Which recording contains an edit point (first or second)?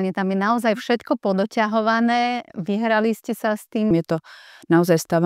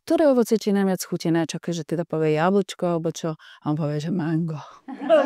first